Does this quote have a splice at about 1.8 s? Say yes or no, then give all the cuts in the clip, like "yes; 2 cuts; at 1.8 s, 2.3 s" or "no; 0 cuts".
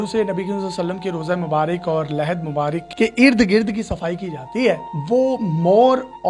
no; 0 cuts